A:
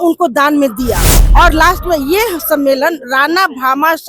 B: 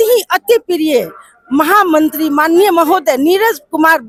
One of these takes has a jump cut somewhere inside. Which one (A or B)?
A